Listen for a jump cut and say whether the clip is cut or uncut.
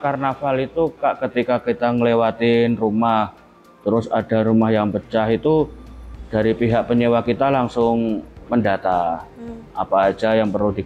uncut